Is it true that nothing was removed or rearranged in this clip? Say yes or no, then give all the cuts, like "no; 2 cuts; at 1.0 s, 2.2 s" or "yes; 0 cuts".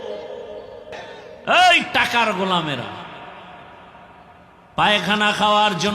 no; 1 cut; at 1.0 s